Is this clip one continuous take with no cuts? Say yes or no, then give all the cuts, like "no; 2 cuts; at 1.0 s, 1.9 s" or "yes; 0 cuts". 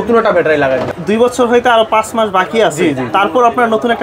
no; 1 cut; at 0.9 s